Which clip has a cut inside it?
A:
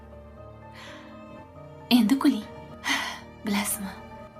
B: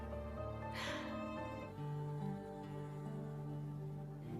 B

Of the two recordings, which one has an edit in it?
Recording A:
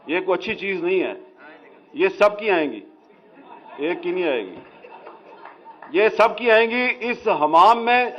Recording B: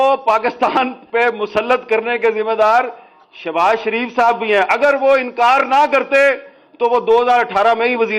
B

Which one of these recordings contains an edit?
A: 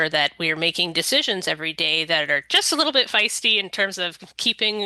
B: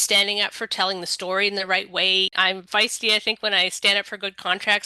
B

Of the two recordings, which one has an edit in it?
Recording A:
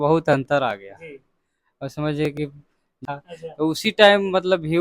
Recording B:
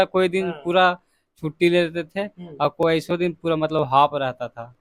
A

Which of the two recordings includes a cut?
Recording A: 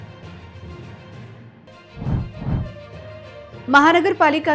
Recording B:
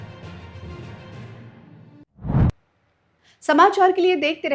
A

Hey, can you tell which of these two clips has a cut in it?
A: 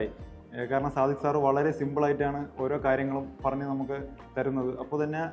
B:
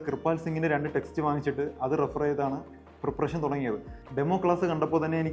B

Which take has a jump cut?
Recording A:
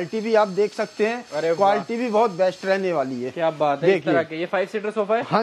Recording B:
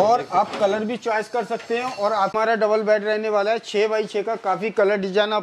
B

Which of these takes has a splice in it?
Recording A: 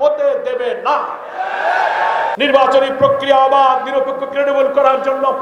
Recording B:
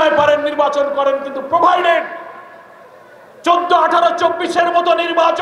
A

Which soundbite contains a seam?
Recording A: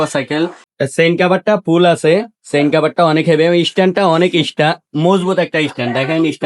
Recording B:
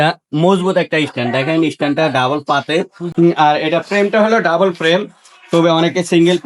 B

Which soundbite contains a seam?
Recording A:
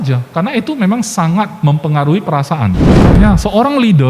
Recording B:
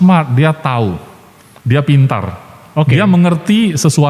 A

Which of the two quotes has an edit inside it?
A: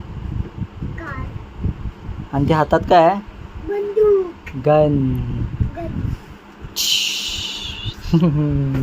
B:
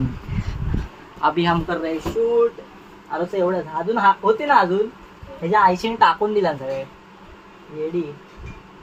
A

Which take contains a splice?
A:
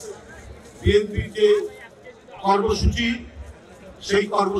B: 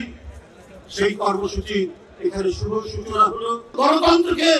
B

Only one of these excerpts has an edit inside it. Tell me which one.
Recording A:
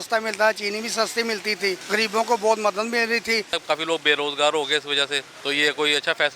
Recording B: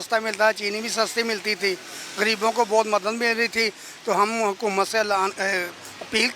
A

